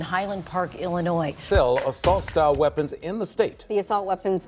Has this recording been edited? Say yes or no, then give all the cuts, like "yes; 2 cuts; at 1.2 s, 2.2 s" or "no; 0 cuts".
yes; 1 cut; at 1.4 s